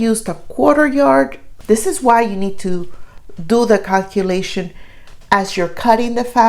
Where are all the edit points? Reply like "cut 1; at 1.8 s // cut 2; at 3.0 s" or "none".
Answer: cut 1; at 1.5 s